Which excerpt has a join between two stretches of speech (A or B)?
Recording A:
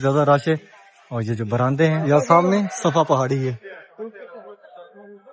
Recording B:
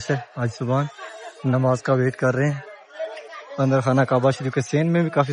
A